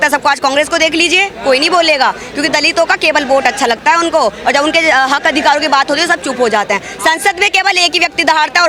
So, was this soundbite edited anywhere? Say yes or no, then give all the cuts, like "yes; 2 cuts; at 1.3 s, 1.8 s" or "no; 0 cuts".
no; 0 cuts